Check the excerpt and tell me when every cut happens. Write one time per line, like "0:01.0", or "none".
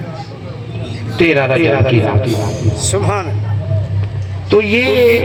none